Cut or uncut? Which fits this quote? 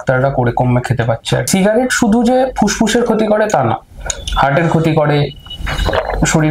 cut